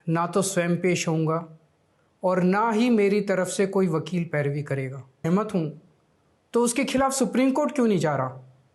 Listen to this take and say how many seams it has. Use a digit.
1